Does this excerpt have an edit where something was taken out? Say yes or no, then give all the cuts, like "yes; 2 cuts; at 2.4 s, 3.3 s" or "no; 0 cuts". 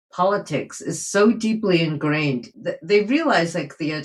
yes; 1 cut; at 2.5 s